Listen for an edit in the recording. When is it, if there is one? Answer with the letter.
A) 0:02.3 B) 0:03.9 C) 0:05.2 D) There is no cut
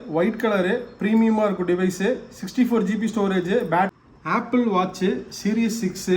B